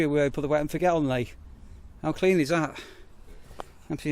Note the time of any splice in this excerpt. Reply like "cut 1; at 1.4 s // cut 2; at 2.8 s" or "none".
none